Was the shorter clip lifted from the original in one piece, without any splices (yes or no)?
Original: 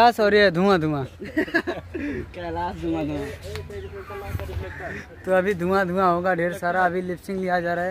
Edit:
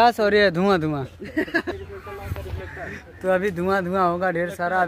no